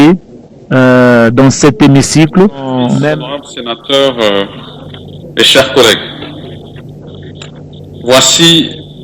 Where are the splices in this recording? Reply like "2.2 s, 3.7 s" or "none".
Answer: 2.9 s

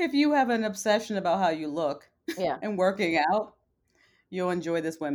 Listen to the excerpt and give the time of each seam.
none

